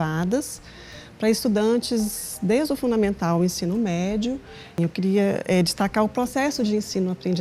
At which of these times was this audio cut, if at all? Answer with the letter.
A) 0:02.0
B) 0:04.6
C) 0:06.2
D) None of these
B